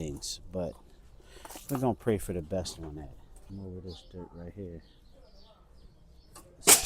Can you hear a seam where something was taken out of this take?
yes; 1 cut; at 3.3 s

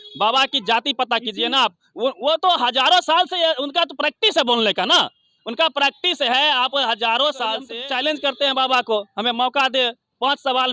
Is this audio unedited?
no; 1 cut; at 7.7 s

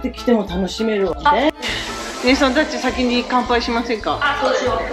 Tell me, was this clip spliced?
yes; 1 cut; at 1.5 s

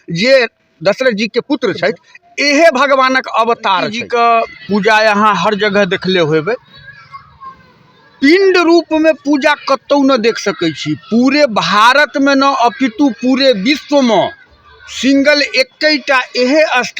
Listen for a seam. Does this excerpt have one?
yes; 1 cut; at 4.1 s

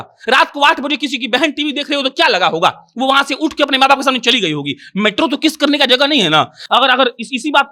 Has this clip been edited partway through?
no; 0 cuts

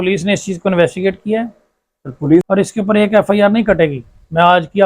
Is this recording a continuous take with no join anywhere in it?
no; 1 cut; at 2.5 s

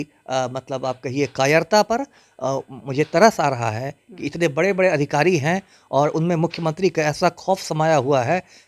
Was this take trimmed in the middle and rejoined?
no; 0 cuts

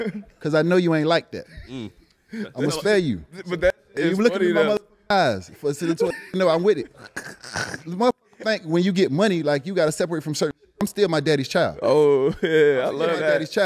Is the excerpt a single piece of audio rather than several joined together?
yes; 0 cuts

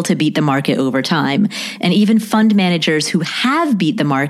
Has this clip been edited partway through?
no; 0 cuts

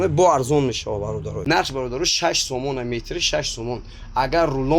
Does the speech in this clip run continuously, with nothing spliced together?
no; 1 cut; at 1.3 s

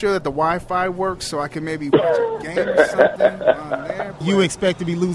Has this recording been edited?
yes; 1 cut; at 4.2 s

